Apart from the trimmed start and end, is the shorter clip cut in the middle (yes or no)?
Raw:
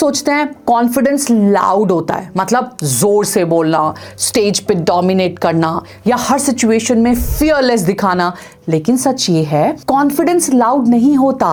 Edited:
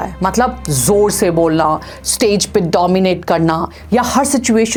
no